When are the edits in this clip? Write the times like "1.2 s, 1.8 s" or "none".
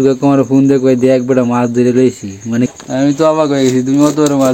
2.7 s